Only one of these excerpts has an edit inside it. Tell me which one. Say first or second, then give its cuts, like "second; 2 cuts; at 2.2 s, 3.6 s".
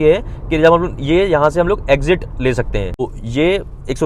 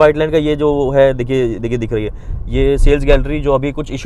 first; 1 cut; at 3.1 s